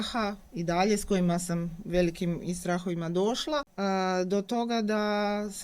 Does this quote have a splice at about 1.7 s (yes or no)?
no